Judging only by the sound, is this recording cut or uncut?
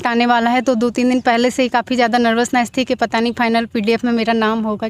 uncut